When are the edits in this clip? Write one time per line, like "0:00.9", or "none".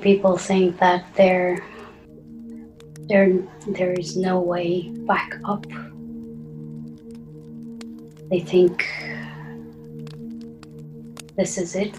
0:01.8
0:03.1
0:05.6
0:08.3